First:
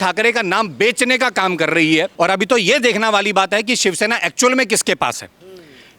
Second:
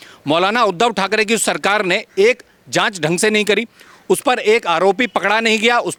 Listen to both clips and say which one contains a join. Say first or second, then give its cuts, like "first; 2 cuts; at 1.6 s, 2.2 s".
first; 1 cut; at 2.1 s